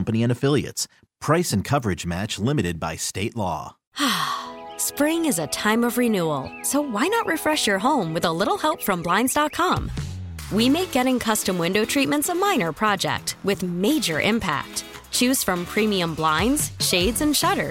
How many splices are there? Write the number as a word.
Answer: one